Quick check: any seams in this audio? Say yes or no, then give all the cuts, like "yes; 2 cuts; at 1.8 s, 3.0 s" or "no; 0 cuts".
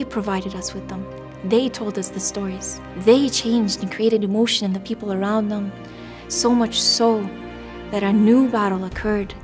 no; 0 cuts